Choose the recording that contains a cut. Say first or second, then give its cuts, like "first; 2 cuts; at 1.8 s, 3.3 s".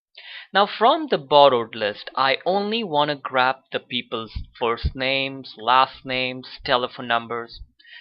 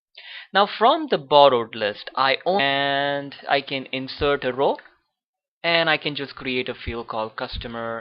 first; 1 cut; at 2.6 s